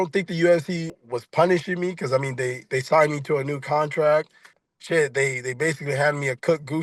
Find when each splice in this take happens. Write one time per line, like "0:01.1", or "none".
0:00.9
0:04.5